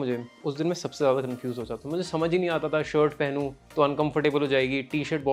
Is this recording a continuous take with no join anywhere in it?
yes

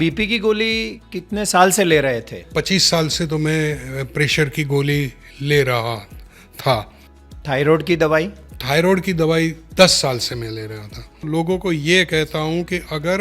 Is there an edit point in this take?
yes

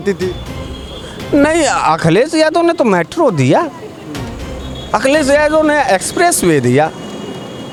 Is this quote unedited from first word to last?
yes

